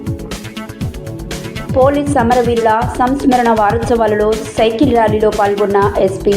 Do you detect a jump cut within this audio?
yes; 1 cut; at 1.4 s

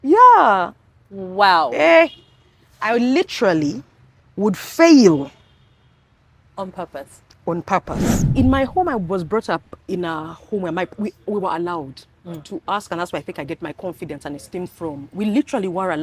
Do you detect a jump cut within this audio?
yes; 1 cut; at 8.3 s

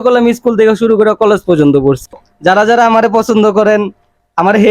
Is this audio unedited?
no; 1 cut; at 2.3 s

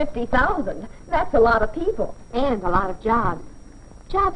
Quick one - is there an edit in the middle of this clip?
yes; 1 cut; at 2.2 s

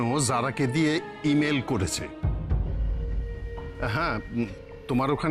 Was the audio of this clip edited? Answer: no; 0 cuts

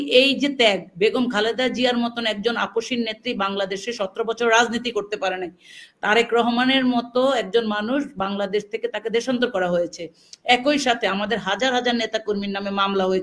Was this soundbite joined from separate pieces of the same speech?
no; 0 cuts

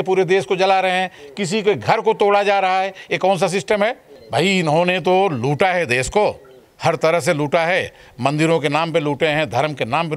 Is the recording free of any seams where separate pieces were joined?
no; 1 cut; at 4.1 s

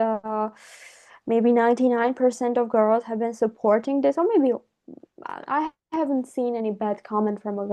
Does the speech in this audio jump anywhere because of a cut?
no; 0 cuts

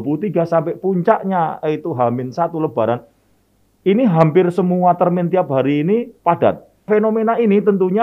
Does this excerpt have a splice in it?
yes; 1 cut; at 6.9 s

